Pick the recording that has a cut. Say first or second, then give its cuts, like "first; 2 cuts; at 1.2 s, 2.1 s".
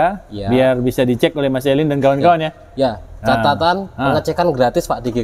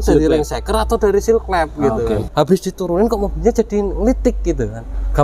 second; 1 cut; at 2.3 s